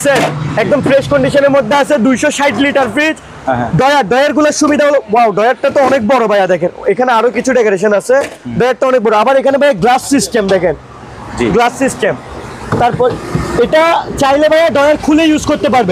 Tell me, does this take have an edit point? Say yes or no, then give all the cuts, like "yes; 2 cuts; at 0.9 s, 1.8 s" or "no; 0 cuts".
no; 0 cuts